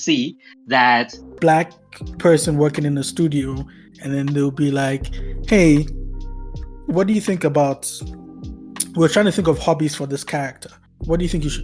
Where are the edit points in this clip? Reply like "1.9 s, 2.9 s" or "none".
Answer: 1.2 s